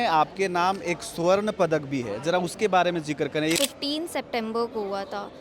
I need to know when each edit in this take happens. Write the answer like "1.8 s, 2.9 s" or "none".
3.6 s